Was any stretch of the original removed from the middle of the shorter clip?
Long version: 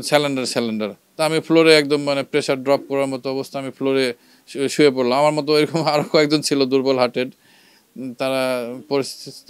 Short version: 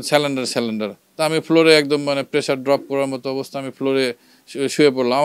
no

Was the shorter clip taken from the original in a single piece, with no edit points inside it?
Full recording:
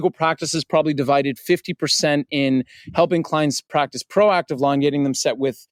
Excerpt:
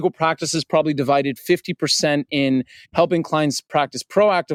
yes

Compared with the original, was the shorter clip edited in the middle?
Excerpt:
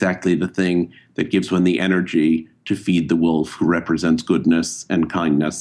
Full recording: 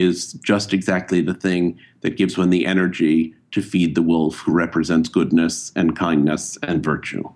no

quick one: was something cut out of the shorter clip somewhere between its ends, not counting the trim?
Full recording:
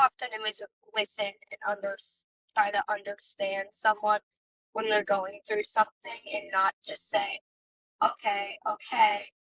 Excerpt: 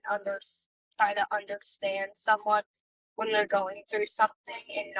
no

